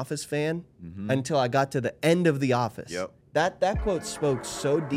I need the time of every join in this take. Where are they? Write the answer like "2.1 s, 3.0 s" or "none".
3.2 s